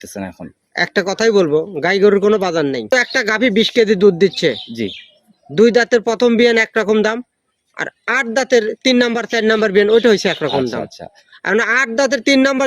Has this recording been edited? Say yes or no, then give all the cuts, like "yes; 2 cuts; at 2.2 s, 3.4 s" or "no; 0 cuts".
yes; 1 cut; at 2.9 s